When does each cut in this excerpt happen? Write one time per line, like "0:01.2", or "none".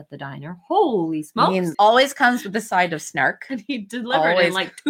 0:01.7